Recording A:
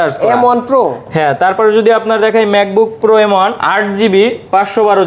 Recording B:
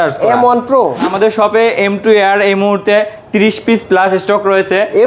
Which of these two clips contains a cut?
B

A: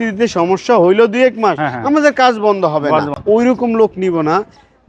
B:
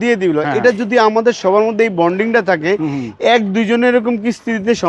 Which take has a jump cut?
A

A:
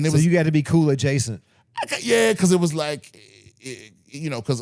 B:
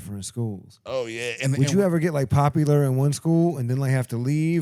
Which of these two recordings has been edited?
B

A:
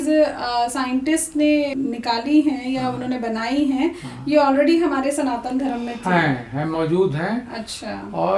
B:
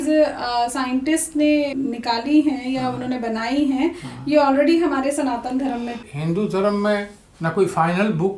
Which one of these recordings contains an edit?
B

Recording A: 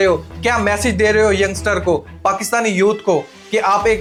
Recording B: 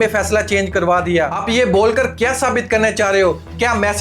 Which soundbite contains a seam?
B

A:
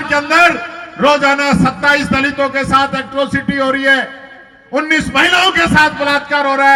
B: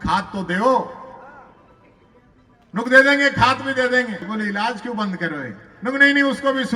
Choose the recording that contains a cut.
B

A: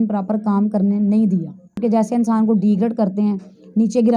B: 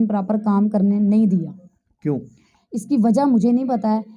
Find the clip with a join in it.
A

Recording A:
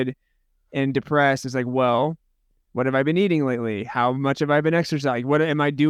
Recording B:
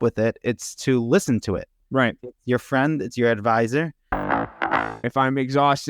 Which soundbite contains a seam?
B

